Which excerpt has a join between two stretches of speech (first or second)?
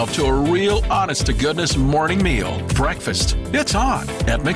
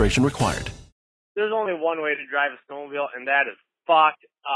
second